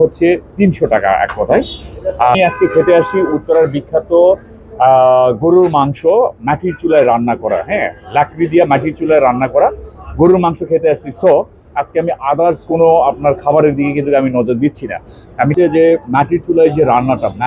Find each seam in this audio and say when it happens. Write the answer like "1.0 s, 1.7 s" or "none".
2.4 s, 15.5 s